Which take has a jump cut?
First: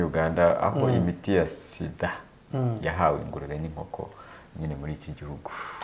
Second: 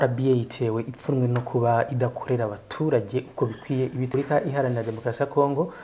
second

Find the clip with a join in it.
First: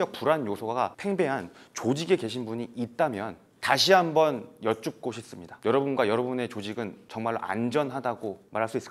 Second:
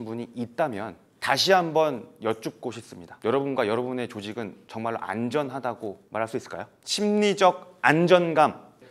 first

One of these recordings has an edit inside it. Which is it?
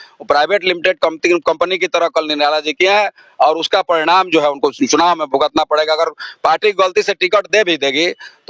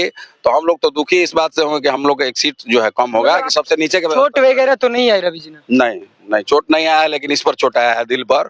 second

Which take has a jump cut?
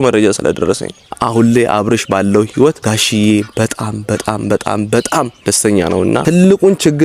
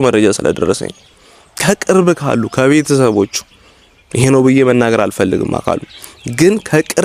first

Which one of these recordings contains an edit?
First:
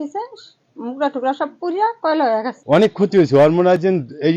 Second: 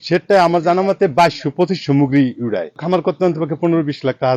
first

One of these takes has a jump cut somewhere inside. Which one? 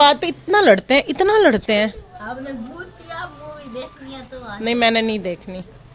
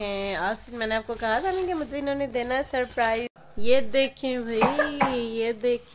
second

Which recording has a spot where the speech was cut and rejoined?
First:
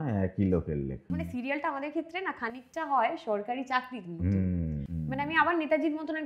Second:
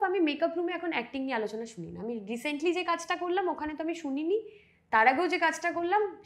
first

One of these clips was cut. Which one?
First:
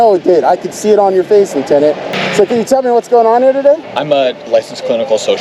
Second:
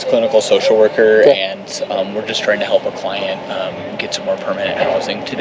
first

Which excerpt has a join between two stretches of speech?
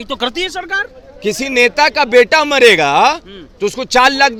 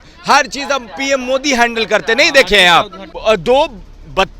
second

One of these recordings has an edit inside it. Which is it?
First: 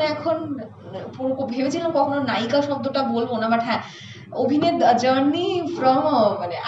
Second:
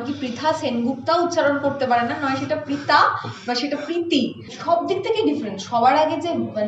second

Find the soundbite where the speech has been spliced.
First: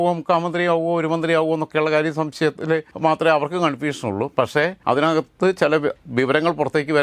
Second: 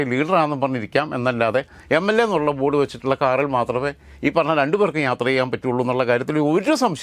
first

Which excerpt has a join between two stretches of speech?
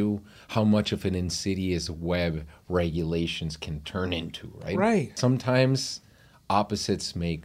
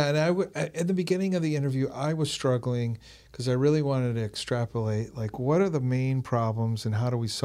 first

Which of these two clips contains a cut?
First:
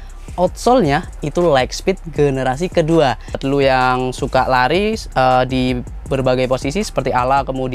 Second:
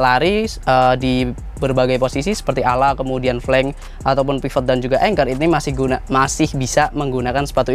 first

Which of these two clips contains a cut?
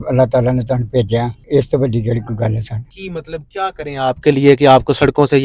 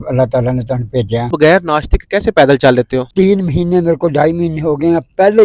second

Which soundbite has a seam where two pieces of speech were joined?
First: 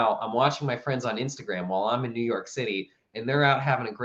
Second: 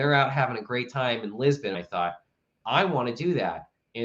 second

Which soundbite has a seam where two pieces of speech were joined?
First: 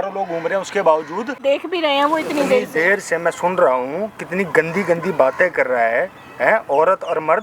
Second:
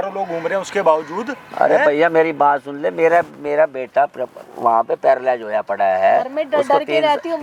first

